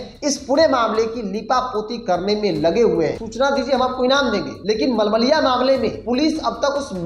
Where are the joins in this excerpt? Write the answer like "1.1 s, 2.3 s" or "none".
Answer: 3.2 s, 4.5 s, 6.0 s